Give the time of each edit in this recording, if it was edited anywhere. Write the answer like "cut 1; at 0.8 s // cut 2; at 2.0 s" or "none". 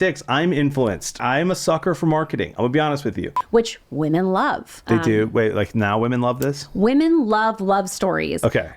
cut 1; at 1.2 s // cut 2; at 3.3 s // cut 3; at 4.8 s